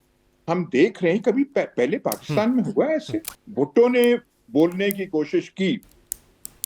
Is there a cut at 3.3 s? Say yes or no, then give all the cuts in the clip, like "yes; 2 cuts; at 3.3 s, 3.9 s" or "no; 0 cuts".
yes; 1 cut; at 3.3 s